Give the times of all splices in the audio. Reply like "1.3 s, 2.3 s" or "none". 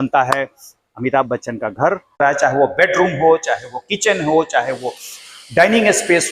2.1 s